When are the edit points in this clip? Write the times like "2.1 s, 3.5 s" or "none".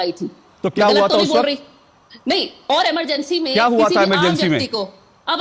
none